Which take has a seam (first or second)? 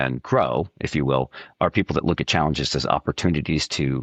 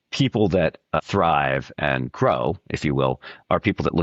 second